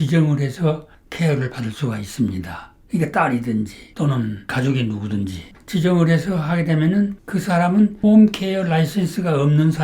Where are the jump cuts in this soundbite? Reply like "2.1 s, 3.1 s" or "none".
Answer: 5.5 s, 7.2 s